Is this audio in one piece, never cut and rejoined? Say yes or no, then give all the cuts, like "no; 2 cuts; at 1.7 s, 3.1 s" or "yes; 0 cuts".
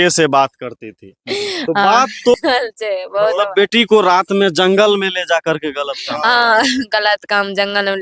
no; 1 cut; at 2.3 s